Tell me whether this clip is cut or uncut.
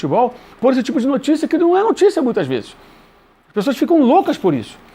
uncut